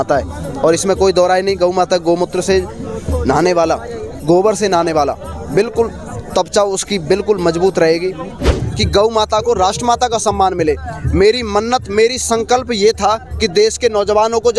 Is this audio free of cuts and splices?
no; 1 cut; at 8.6 s

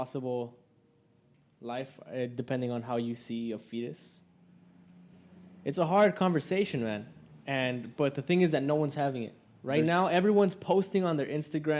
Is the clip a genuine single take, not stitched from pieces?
no; 1 cut; at 5.1 s

